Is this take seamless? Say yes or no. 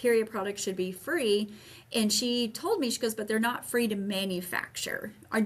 yes